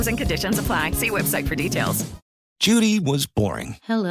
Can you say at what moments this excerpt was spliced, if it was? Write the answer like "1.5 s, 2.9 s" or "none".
2.5 s

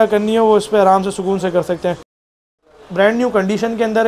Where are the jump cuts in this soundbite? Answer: 2.3 s

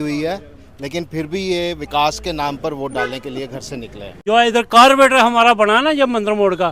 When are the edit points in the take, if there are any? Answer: 4.1 s

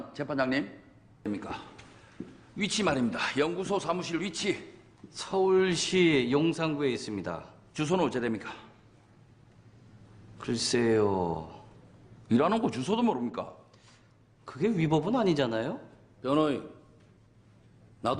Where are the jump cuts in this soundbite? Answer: 8.2 s

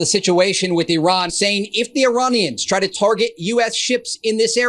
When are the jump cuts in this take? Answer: 1.3 s

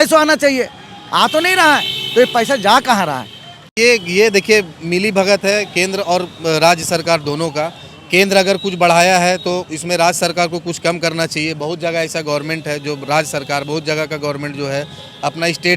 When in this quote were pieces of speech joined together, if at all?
3.7 s

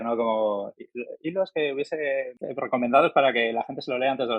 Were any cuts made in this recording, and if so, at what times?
2.4 s

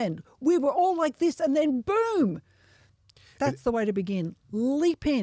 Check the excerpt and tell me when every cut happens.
none

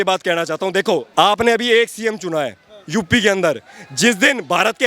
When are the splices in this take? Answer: 1.1 s

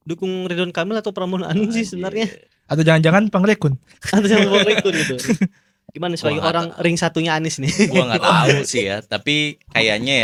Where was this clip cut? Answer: none

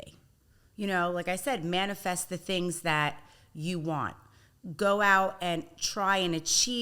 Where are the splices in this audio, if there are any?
none

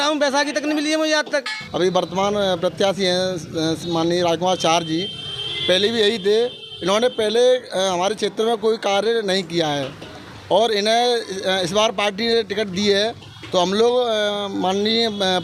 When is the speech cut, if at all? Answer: 1.6 s

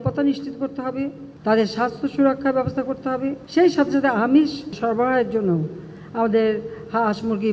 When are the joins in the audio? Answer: 1.3 s, 3.4 s, 4.7 s

